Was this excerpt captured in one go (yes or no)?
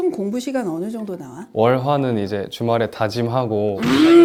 yes